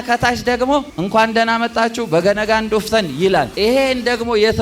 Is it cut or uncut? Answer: cut